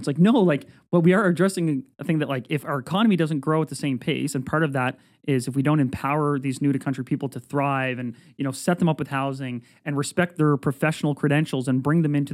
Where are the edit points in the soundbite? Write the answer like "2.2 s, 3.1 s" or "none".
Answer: none

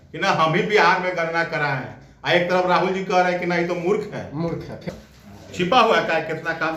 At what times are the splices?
4.8 s

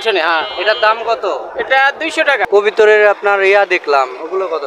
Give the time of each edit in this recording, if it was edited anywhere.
2.5 s

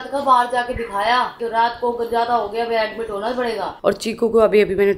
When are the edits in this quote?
1.3 s, 3.7 s

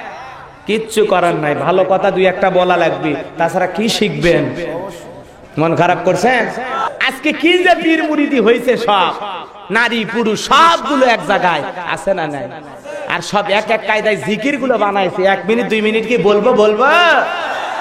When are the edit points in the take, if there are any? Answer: 6.9 s

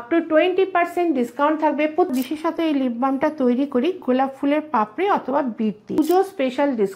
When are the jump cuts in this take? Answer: 2.1 s, 6.0 s

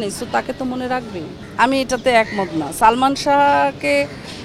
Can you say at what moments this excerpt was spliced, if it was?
none

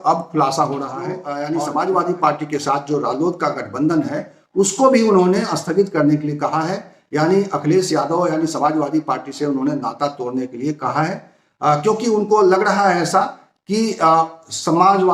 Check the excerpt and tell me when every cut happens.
1.3 s

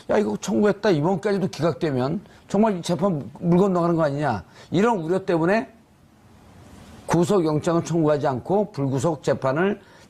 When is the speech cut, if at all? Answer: 4.6 s

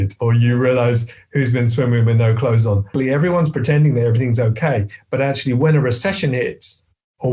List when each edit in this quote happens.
2.9 s

